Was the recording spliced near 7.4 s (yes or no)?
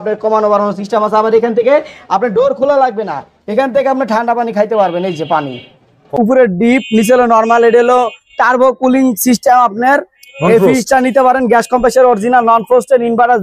no